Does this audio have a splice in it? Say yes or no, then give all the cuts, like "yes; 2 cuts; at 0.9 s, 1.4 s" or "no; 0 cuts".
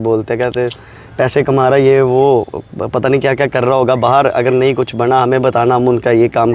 no; 0 cuts